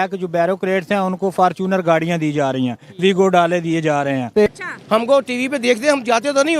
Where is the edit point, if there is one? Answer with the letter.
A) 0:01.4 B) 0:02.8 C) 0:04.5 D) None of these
C